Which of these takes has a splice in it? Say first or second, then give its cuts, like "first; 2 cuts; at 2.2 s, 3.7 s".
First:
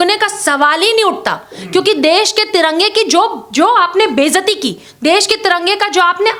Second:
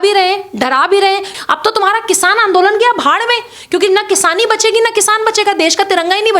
second; 1 cut; at 1.3 s